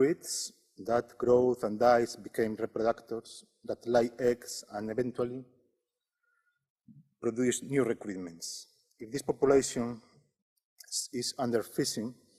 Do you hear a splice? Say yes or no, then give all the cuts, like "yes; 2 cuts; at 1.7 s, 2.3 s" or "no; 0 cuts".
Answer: yes; 1 cut; at 5.7 s